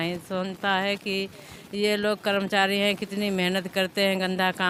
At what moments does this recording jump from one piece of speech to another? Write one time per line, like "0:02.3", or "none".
none